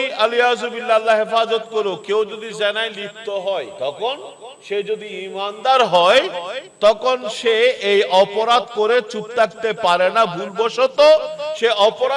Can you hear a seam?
yes; 1 cut; at 3.7 s

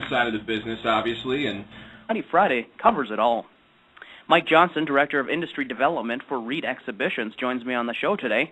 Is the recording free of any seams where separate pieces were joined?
yes; 0 cuts

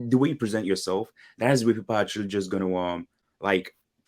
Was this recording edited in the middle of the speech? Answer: no; 0 cuts

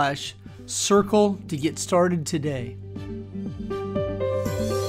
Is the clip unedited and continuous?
no; 1 cut; at 2.7 s

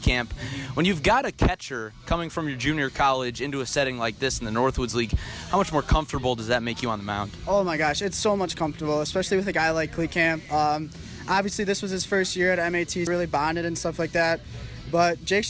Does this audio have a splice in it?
yes; 1 cut; at 13.1 s

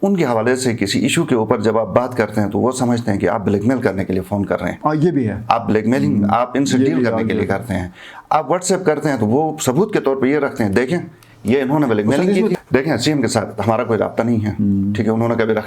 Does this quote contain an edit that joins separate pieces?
yes; 1 cut; at 12.5 s

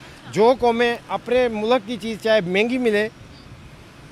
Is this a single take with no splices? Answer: yes; 0 cuts

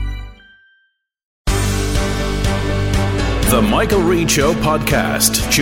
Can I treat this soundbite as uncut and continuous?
no; 1 cut; at 1.4 s

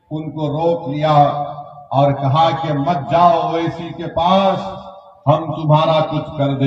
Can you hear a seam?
no; 0 cuts

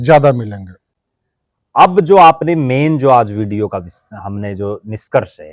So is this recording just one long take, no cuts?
yes; 0 cuts

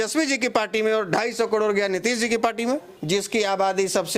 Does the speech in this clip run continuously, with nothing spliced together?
no; 1 cut; at 2.9 s

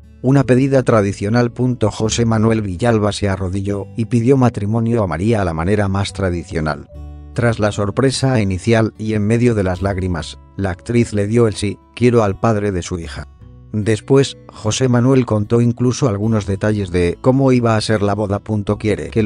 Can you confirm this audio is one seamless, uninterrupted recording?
no; 1 cut; at 6.0 s

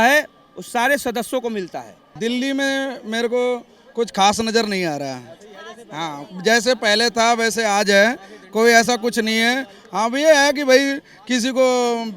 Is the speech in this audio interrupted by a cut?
yes; 1 cut; at 2.0 s

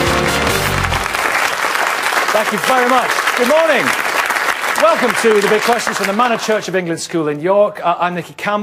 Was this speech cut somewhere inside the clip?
no; 0 cuts

